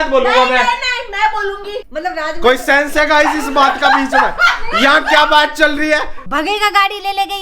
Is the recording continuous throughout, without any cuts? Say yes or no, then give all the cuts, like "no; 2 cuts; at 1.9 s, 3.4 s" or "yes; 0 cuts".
no; 2 cuts; at 1.8 s, 6.3 s